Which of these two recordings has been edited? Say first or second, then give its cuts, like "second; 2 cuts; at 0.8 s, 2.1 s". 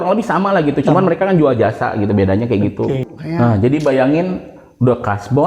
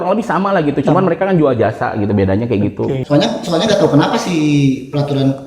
second; 1 cut; at 3.0 s